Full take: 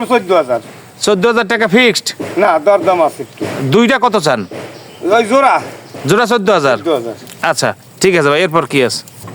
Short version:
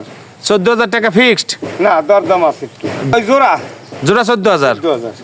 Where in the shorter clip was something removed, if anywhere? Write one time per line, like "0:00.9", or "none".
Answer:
0:03.1